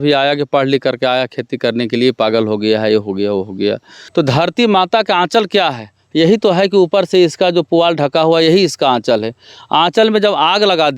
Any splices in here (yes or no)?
yes